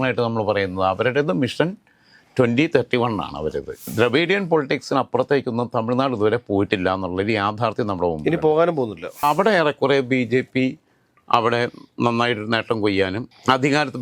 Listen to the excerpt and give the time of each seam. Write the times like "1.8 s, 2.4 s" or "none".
3.9 s, 9.2 s

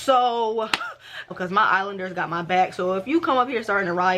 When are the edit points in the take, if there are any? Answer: 1.3 s

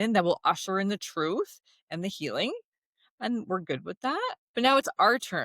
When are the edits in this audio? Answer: 4.4 s

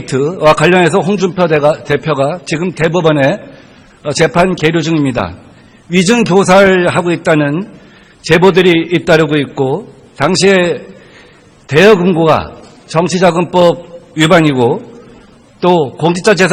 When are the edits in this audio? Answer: 12.1 s

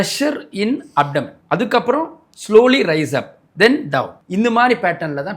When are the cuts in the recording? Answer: 1.4 s, 4.2 s

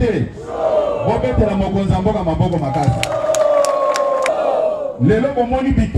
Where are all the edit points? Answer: 4.3 s

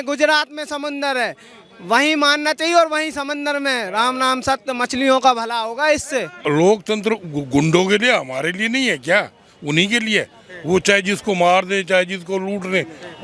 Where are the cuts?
6.4 s

